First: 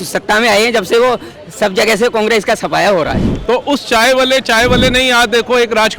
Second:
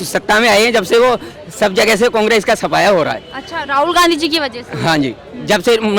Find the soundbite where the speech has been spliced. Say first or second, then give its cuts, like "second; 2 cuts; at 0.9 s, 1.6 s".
first; 1 cut; at 3.3 s